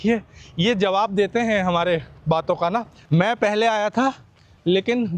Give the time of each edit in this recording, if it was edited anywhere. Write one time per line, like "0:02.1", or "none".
0:03.0